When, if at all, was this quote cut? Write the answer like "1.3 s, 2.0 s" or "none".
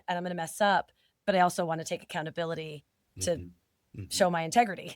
none